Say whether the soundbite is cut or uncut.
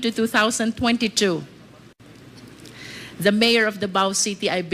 uncut